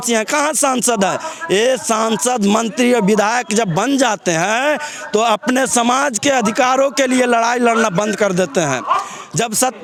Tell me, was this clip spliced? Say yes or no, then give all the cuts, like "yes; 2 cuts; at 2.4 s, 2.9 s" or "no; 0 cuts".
no; 0 cuts